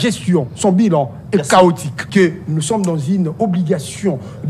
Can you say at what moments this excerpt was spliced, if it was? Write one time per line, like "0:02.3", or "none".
0:01.9